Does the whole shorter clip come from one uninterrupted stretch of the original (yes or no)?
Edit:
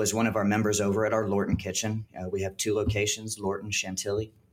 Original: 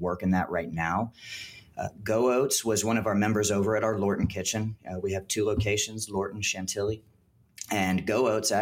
yes